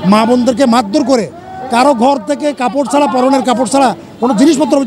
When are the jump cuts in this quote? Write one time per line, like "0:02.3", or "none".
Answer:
none